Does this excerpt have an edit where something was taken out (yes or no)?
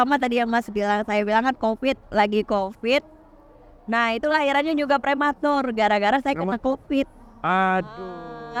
no